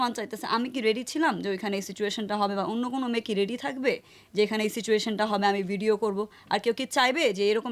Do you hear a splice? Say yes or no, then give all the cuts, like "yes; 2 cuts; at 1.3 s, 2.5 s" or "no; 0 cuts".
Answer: no; 0 cuts